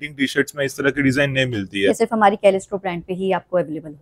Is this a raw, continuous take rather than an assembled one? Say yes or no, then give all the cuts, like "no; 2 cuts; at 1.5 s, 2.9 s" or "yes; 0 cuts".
yes; 0 cuts